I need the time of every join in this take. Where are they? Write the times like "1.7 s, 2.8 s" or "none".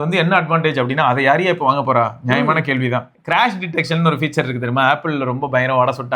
3.1 s